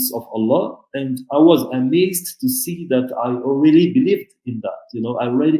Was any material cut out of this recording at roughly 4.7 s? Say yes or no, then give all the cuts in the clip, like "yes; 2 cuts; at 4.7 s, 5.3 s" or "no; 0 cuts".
no; 0 cuts